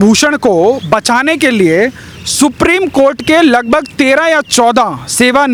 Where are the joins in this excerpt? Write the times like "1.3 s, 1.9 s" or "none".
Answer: none